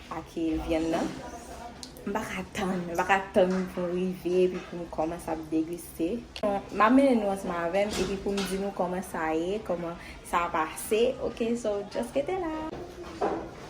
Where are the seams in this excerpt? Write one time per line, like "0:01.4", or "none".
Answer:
0:06.4
0:12.7